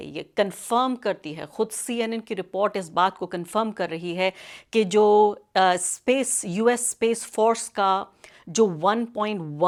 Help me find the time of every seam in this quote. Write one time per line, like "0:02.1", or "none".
none